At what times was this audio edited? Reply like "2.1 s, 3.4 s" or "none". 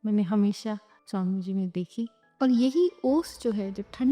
0.9 s, 2.2 s

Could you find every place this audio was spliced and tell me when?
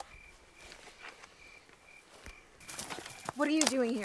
2.9 s

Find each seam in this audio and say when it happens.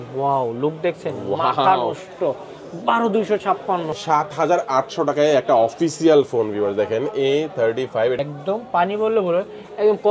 3.9 s, 8.2 s

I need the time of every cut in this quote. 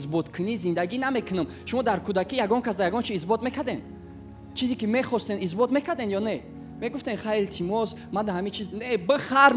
none

